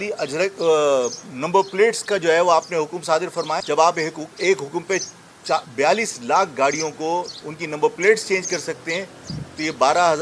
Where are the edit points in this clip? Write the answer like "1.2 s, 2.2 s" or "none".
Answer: 3.6 s